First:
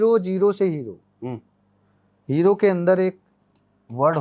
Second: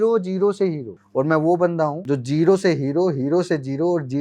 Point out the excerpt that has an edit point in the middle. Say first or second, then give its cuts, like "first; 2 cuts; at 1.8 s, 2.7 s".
second; 2 cuts; at 0.9 s, 2.0 s